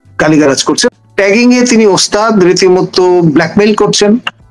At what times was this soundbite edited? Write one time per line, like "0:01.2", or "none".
0:00.9

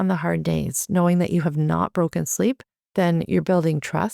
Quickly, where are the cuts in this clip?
0:02.7

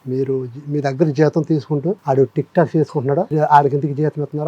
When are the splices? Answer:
0:02.0
0:03.3

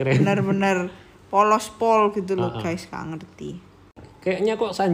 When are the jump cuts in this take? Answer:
0:03.9

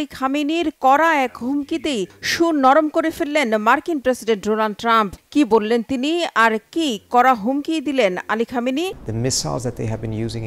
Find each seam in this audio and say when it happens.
0:09.0

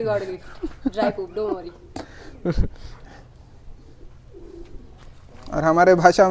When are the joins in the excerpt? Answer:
none

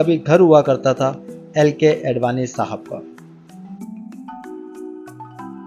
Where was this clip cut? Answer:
none

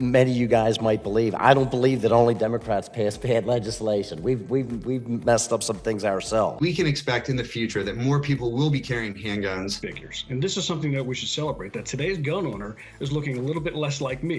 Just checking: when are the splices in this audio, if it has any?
0:06.5
0:09.8

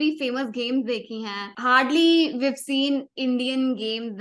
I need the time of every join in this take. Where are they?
0:01.5

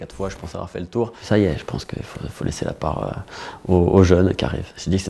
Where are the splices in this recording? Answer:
0:01.2

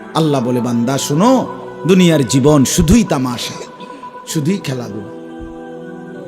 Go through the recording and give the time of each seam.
0:05.4

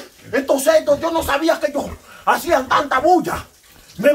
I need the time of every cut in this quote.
none

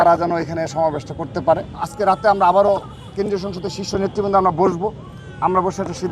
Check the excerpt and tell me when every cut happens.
0:01.9

